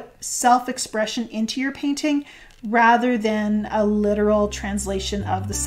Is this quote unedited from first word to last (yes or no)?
yes